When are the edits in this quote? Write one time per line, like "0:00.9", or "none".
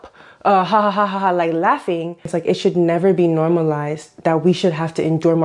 0:02.3